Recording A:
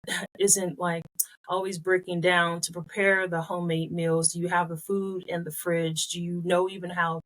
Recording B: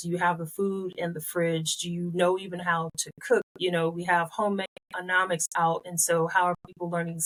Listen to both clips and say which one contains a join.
A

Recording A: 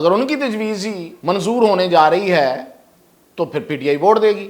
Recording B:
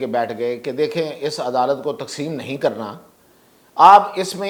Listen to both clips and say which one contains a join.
A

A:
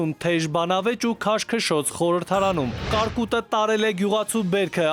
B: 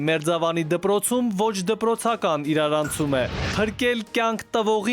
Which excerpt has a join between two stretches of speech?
B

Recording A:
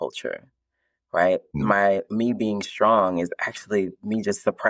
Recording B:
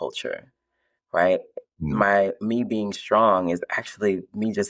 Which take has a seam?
A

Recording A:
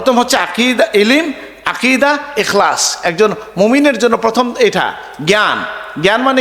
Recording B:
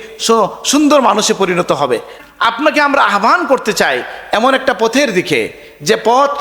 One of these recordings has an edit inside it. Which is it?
B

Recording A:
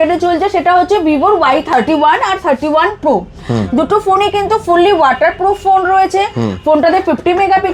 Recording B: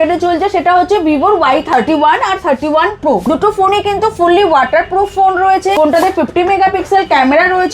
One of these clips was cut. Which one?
B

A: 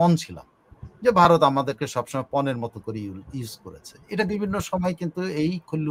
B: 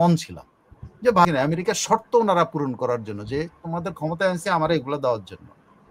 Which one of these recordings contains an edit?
B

